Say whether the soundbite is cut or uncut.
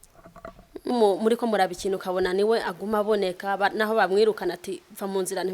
cut